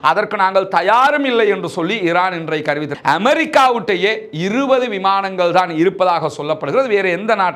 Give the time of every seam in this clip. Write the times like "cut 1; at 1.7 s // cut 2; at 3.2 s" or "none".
cut 1; at 2.9 s